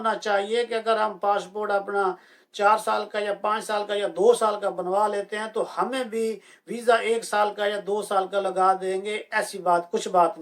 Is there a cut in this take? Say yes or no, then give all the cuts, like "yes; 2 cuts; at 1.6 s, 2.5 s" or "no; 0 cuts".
no; 0 cuts